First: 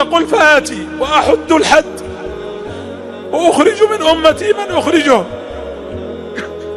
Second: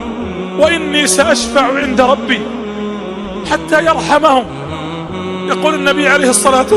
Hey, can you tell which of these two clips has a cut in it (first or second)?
first